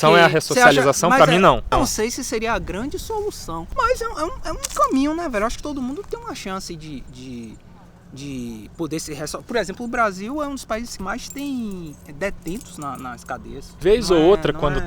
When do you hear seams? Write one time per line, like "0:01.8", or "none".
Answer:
0:01.7
0:03.5
0:10.9
0:13.7